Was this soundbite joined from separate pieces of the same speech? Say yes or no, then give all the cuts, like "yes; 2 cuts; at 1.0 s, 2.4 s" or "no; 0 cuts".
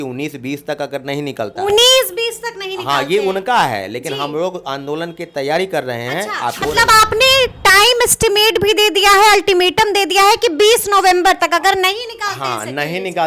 yes; 1 cut; at 6.6 s